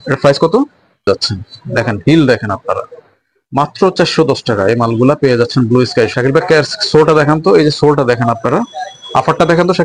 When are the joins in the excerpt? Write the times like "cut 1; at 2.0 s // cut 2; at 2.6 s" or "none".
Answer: cut 1; at 1.1 s // cut 2; at 6.1 s